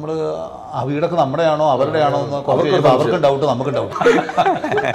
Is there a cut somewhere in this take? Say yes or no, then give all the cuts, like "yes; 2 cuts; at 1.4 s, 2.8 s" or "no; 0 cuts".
yes; 1 cut; at 3.8 s